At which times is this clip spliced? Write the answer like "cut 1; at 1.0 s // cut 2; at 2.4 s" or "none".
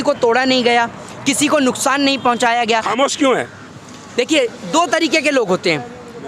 cut 1; at 2.9 s